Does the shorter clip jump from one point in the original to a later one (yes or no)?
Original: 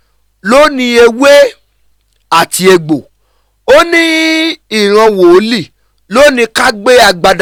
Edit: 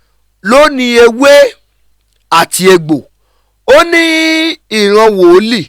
no